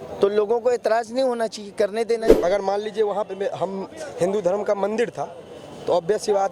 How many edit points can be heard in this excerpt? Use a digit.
1